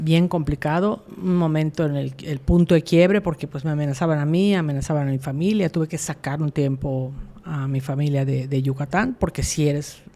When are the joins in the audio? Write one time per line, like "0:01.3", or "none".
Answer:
none

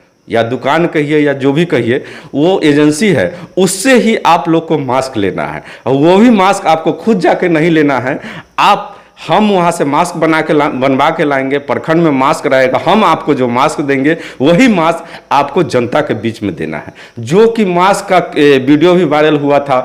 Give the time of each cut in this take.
none

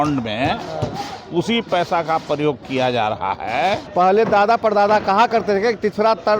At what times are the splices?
0:03.8

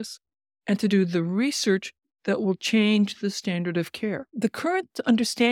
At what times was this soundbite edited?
0:04.3

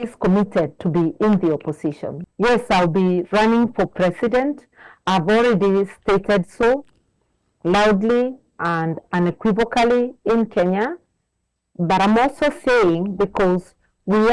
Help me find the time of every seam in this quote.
0:02.1

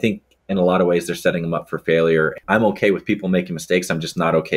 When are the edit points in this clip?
0:02.3

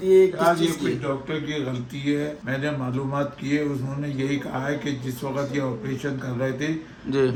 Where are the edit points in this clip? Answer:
none

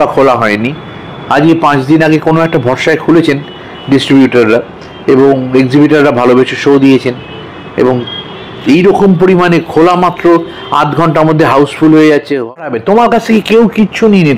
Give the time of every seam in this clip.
0:12.5

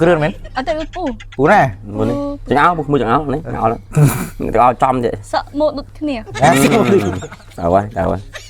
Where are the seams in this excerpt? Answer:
none

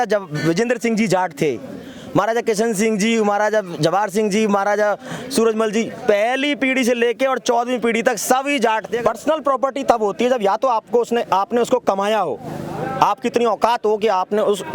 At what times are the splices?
0:08.9

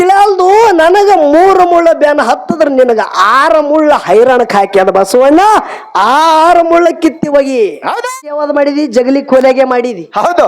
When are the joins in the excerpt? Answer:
0:08.3

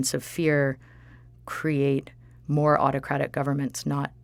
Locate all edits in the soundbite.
none

